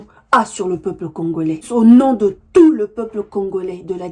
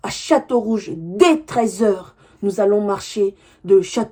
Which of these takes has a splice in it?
first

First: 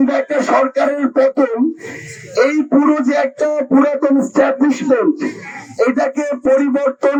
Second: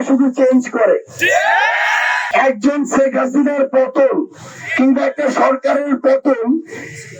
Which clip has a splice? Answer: second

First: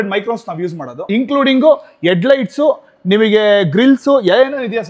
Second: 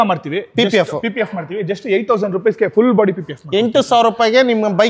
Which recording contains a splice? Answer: first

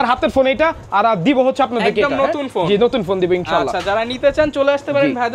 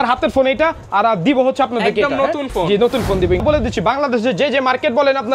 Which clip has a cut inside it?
second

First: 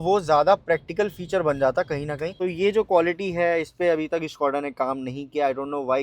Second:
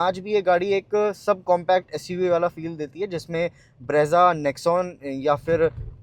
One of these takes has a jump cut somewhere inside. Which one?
first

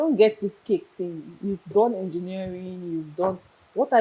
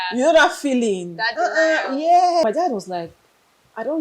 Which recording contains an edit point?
second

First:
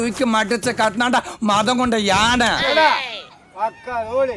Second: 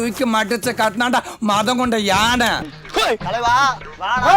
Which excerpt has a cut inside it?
second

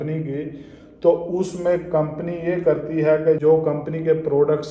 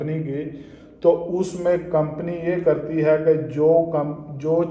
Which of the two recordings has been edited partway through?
first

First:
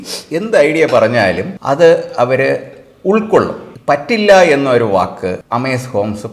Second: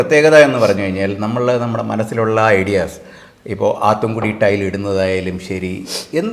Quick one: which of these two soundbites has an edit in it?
first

